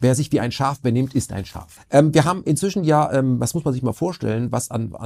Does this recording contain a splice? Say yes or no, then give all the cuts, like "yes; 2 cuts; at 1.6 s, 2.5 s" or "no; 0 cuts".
yes; 1 cut; at 1.7 s